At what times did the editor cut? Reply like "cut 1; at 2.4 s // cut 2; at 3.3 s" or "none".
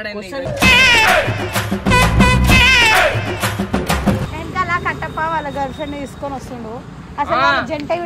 cut 1; at 4.4 s